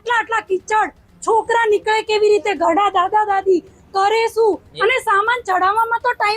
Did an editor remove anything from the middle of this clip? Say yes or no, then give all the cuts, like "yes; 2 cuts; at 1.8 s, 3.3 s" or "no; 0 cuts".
no; 0 cuts